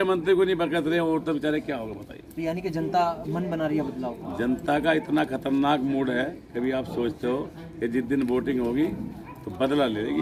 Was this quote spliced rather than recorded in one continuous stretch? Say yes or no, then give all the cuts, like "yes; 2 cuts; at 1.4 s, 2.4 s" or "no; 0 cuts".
no; 0 cuts